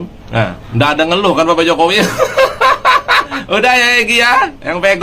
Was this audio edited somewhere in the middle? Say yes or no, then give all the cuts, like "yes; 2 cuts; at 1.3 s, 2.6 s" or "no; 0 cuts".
yes; 1 cut; at 3.3 s